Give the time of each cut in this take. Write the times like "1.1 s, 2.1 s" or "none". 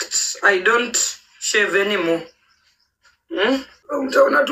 3.5 s

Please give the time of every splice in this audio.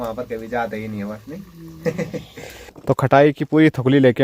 2.8 s

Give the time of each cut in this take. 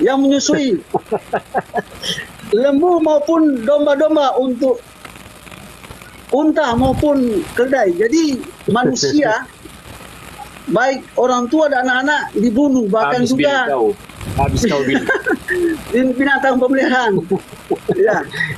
none

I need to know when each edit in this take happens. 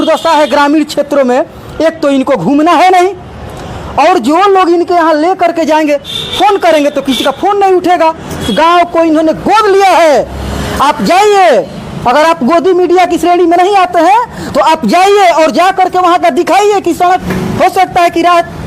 8.5 s, 17.2 s

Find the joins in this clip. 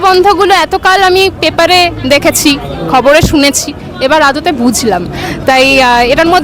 none

